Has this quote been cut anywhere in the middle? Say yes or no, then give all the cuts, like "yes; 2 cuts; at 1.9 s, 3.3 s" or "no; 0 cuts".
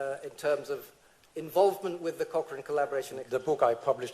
yes; 1 cut; at 3.2 s